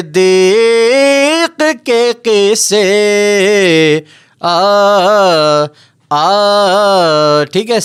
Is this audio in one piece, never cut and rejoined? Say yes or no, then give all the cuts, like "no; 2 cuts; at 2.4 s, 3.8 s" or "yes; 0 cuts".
yes; 0 cuts